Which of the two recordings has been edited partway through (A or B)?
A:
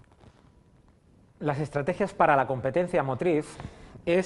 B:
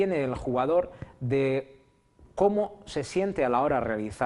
B